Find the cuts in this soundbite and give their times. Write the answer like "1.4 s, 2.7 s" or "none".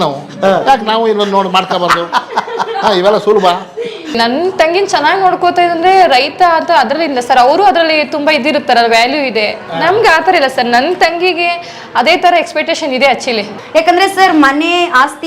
4.2 s, 13.6 s